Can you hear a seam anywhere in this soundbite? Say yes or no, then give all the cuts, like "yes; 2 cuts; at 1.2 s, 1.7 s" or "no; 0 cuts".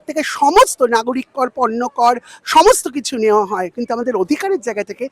yes; 1 cut; at 3.7 s